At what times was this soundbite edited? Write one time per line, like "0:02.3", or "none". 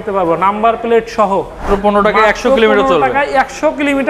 0:01.6